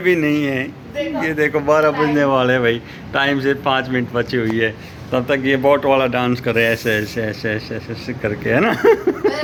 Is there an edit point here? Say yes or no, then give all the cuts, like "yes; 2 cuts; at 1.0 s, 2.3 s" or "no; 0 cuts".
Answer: no; 0 cuts